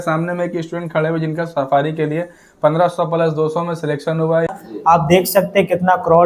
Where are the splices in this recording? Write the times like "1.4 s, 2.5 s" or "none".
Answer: 4.5 s